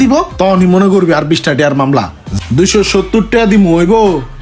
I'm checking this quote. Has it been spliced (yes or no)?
yes